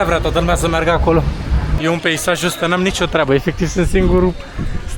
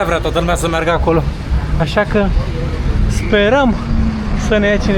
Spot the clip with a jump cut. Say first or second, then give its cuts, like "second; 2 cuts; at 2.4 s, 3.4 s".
first; 1 cut; at 1.7 s